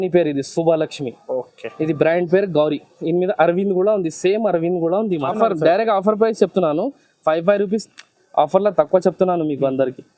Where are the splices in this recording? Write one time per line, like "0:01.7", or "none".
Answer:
0:05.3